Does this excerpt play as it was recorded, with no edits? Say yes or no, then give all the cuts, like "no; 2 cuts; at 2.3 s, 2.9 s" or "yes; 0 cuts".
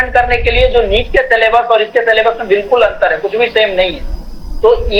yes; 0 cuts